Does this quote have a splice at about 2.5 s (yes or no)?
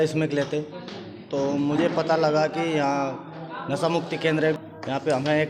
no